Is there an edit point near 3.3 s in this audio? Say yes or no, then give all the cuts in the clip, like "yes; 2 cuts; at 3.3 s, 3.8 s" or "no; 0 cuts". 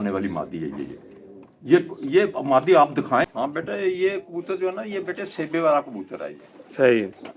yes; 1 cut; at 3.3 s